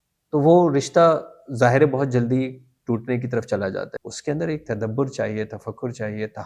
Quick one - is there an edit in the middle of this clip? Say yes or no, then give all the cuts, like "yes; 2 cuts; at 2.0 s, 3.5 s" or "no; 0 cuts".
yes; 1 cut; at 3.9 s